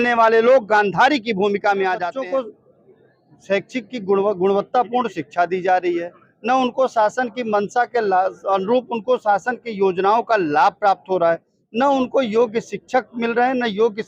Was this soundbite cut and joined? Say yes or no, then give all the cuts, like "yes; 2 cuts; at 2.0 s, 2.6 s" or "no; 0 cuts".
yes; 1 cut; at 2.1 s